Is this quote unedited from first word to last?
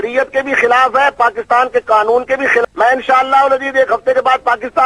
no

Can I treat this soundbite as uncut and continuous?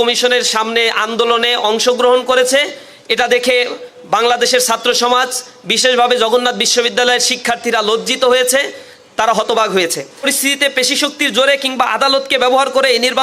no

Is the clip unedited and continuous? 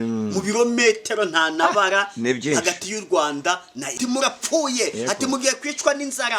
no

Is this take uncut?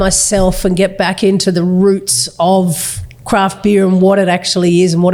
yes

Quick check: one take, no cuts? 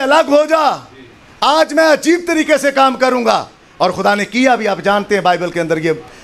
yes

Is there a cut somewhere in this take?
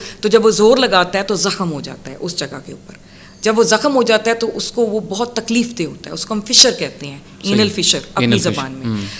no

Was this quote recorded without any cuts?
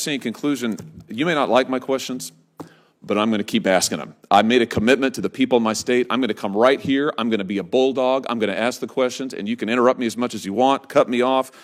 yes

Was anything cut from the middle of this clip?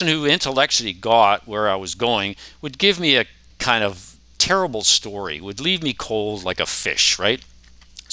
yes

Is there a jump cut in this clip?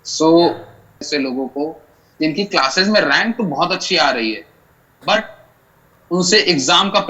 yes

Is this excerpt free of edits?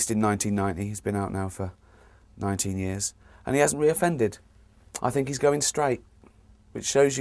no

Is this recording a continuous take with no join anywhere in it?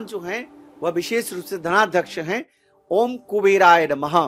yes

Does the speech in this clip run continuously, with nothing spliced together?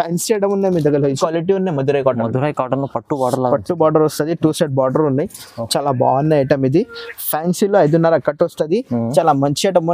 no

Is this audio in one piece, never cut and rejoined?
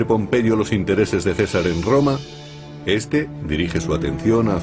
no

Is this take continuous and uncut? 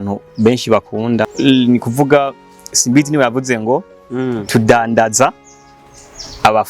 no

